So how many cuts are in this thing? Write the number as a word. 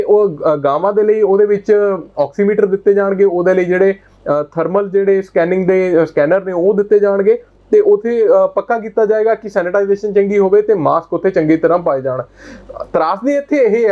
zero